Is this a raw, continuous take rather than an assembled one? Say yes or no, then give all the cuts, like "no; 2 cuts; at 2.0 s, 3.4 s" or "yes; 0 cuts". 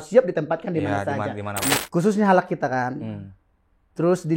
no; 1 cut; at 1.8 s